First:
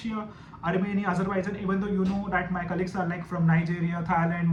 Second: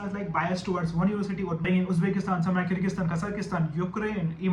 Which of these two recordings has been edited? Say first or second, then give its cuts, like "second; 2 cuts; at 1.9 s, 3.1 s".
second; 1 cut; at 1.6 s